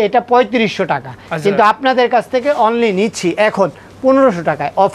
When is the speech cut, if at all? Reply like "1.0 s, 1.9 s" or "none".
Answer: none